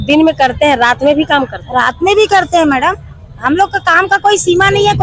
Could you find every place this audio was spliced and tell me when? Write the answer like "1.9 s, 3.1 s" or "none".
none